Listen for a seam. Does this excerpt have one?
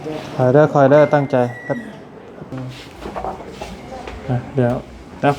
yes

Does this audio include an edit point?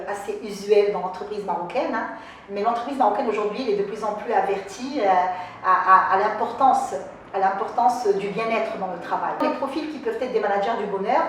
yes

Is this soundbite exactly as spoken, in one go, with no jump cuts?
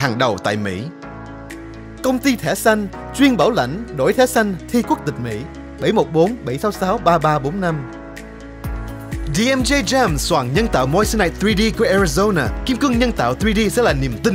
yes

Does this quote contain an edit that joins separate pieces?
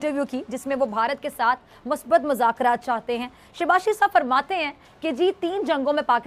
no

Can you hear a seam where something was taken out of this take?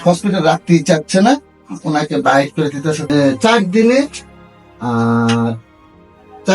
yes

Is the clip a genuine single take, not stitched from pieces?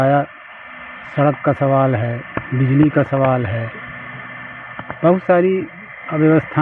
yes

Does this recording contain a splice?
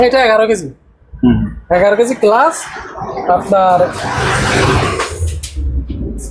no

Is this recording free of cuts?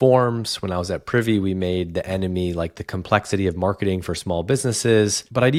yes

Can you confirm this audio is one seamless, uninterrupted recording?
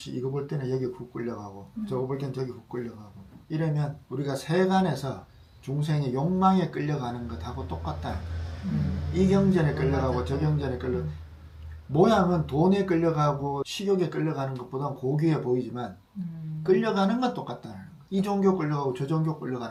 yes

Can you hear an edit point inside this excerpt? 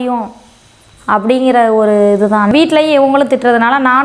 yes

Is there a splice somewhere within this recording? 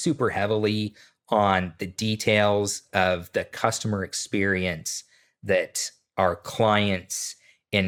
no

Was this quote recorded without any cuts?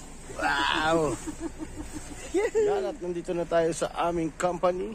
no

